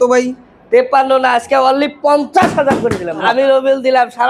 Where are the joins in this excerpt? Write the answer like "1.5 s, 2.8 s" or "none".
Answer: 3.2 s